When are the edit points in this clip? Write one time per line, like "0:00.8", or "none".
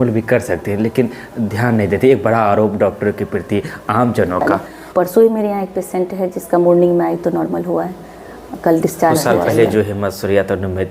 0:04.7
0:09.3